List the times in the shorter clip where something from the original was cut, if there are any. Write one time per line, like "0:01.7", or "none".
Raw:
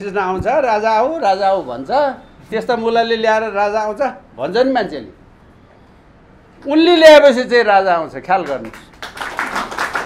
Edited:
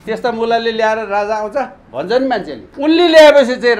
0:02.6

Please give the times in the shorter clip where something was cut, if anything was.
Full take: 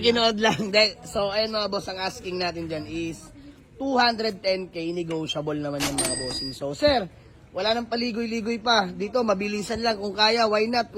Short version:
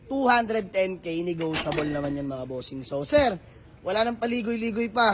none

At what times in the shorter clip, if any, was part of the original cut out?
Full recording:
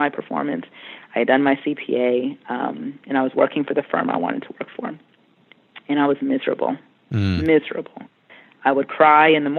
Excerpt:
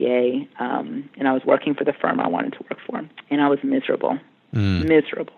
0:03.1

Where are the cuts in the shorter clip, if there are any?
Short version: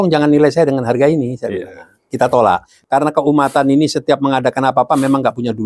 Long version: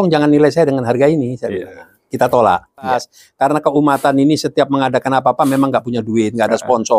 0:02.7

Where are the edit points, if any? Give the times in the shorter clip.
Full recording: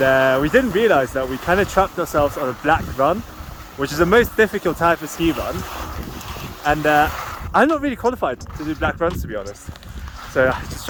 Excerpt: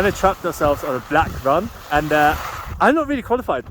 0:01.8

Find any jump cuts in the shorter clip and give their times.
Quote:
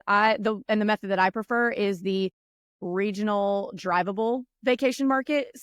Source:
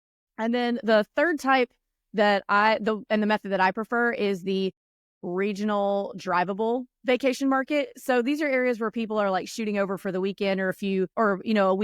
none

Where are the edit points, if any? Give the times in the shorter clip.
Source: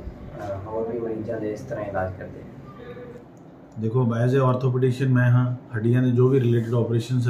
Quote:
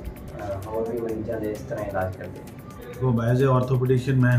0:03.0

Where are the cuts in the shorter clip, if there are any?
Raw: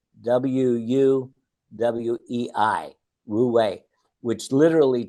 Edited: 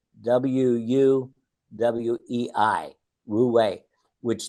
none

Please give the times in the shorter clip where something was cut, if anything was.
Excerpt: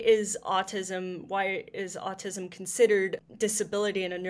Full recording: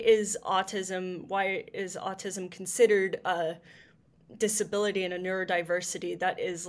0:03.2

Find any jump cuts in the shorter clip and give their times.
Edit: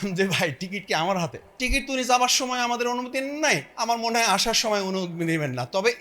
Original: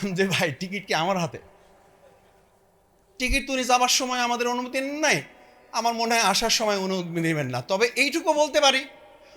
0:01.4
0:03.7

